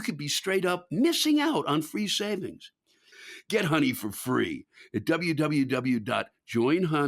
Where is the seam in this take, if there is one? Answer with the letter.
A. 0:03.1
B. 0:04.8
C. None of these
A